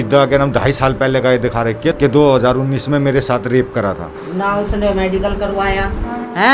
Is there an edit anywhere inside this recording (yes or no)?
yes